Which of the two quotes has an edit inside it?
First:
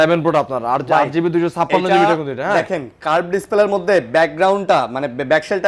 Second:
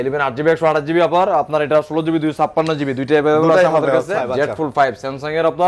second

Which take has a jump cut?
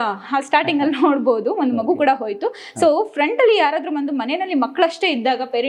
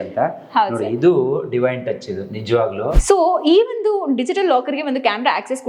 second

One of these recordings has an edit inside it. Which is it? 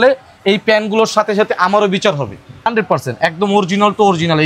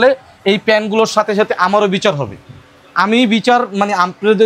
first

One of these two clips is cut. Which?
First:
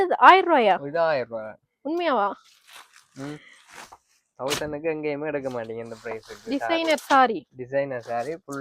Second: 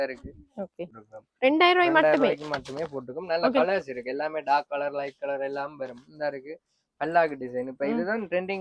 second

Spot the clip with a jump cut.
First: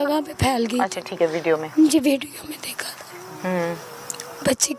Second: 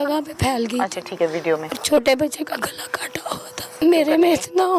second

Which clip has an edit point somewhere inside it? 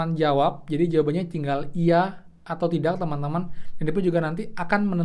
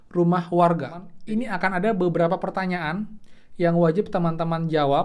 second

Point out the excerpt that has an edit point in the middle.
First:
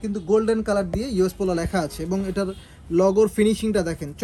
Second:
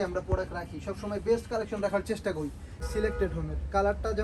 second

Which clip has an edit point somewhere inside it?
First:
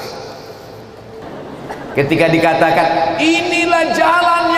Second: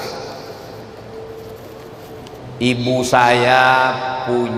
first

